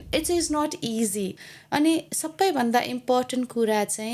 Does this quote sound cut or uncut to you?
cut